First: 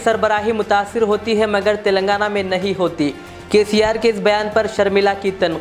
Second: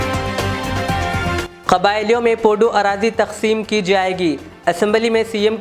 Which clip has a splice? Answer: second; 1 cut; at 1.3 s

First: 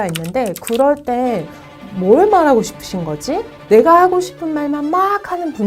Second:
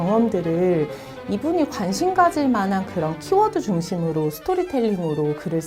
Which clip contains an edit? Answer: first; 2 cuts; at 1.8 s, 3.5 s

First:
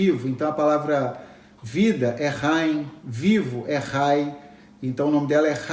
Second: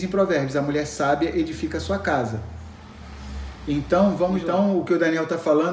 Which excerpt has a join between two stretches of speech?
second; 1 cut; at 4.4 s

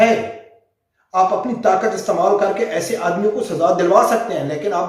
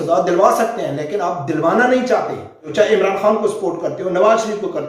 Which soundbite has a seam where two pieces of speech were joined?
second; 1 cut; at 2.6 s

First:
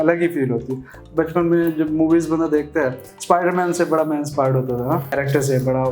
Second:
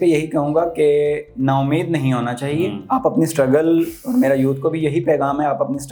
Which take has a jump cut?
first; 1 cut; at 1.0 s

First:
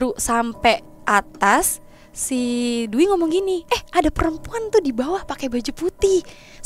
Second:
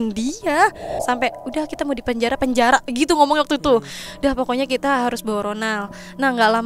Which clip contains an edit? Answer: second; 1 cut; at 0.9 s

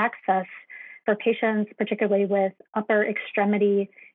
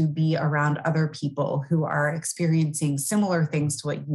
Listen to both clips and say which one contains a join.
first; 1 cut; at 1.0 s

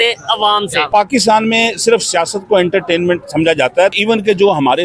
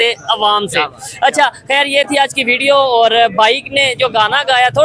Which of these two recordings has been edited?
first; 2 cuts; at 0.8 s, 3.9 s

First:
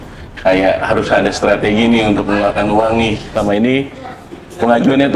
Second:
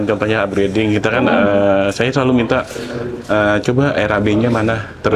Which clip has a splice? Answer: first; 1 cut; at 3.2 s

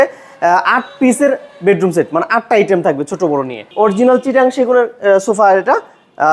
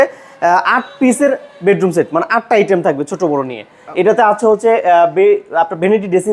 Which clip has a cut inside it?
first; 1 cut; at 3.6 s

